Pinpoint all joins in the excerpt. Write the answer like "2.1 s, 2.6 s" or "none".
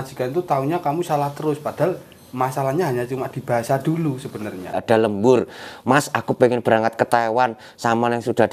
4.8 s